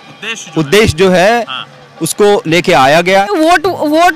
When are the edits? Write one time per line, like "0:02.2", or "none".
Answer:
0:03.3